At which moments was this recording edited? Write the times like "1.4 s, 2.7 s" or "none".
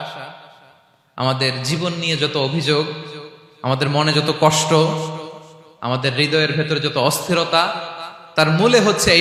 none